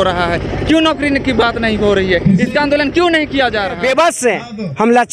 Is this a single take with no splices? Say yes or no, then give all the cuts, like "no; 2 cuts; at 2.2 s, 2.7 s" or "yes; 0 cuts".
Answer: no; 1 cut; at 3.8 s